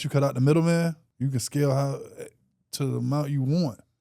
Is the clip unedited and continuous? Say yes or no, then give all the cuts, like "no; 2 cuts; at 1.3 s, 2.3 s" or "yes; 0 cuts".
no; 1 cut; at 1.1 s